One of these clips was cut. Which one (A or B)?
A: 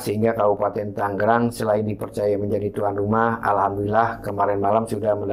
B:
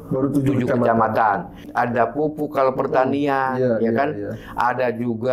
B